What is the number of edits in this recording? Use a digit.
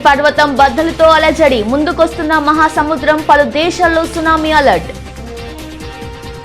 1